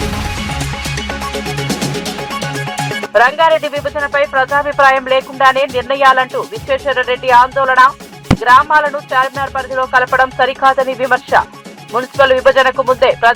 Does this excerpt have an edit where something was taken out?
no; 0 cuts

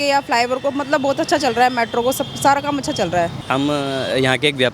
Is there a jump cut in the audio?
yes; 1 cut; at 3.4 s

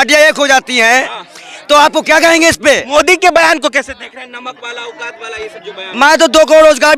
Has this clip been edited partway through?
no; 0 cuts

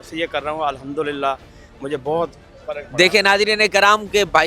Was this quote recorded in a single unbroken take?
yes; 0 cuts

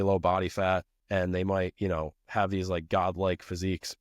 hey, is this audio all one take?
no; 1 cut; at 0.9 s

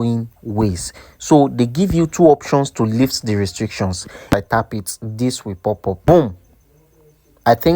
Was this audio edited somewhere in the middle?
yes; 2 cuts; at 4.3 s, 6.0 s

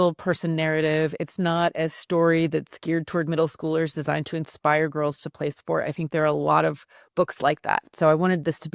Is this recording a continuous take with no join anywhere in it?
yes; 0 cuts

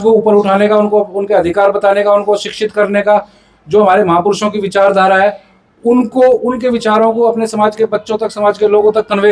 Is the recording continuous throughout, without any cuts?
yes; 0 cuts

